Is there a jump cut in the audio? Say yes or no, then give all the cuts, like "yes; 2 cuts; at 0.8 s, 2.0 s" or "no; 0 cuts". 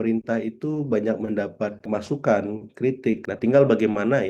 yes; 2 cuts; at 1.9 s, 3.2 s